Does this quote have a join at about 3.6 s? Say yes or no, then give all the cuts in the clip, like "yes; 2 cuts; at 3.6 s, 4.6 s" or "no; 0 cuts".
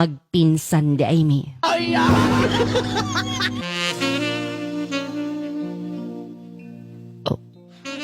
yes; 1 cut; at 3.6 s